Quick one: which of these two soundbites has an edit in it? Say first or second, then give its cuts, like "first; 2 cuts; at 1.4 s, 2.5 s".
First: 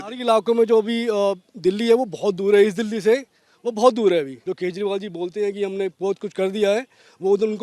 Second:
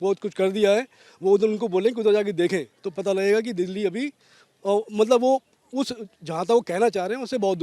first; 1 cut; at 4.4 s